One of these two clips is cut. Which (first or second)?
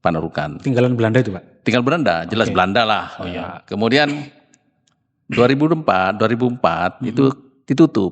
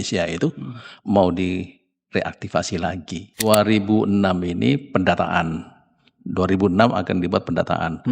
second